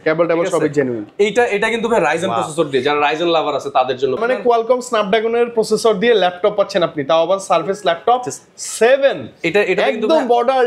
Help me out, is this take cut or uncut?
cut